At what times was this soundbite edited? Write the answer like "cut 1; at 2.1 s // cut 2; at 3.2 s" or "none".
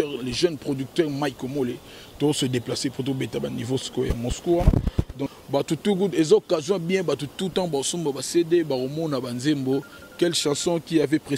cut 1; at 5.2 s